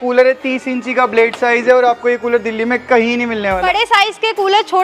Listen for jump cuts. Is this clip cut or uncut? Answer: cut